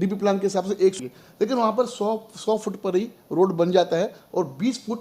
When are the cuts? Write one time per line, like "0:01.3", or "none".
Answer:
0:01.0